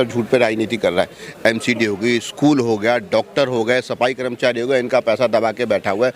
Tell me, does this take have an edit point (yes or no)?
yes